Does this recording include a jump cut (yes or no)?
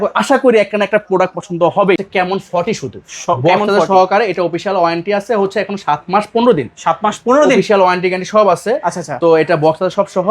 yes